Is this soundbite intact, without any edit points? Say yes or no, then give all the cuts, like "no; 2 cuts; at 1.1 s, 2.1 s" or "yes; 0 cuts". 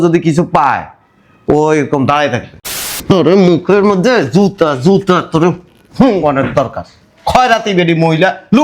no; 1 cut; at 3.0 s